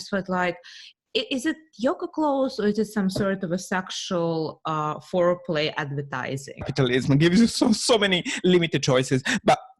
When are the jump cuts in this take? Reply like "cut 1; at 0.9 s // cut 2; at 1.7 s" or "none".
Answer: cut 1; at 6.7 s